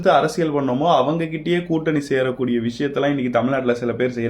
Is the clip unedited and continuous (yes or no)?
yes